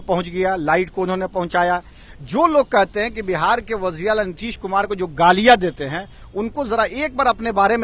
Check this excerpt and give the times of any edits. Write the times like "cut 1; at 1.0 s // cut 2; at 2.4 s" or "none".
none